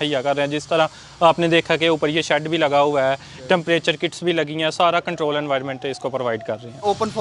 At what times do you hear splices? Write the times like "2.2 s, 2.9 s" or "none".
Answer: none